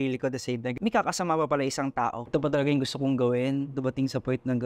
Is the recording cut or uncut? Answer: cut